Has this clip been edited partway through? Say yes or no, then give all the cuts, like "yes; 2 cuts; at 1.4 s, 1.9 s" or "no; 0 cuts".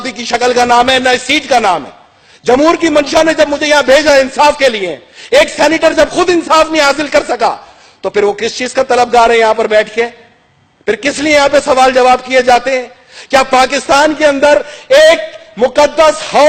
no; 0 cuts